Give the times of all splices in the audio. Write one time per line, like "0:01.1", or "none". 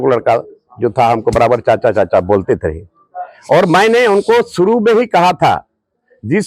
none

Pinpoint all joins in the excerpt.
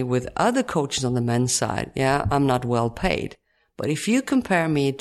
none

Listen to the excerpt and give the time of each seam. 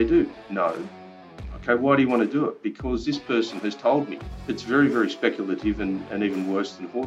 0:04.2

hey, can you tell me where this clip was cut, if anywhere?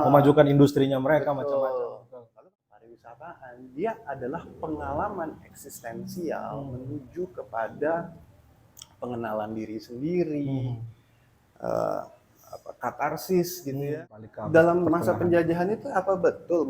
0:02.2
0:13.9

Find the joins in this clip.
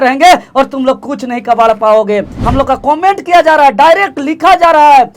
0:02.3

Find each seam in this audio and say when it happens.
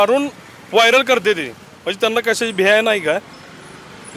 none

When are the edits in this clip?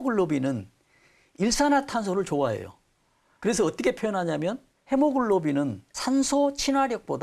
0:04.7
0:05.9

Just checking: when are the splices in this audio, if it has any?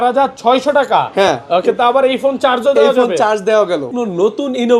0:03.9

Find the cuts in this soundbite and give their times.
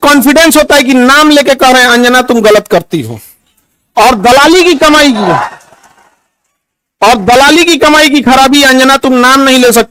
none

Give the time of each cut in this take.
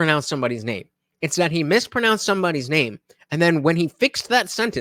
none

